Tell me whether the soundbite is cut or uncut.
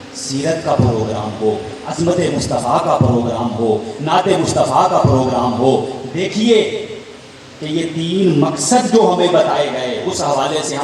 uncut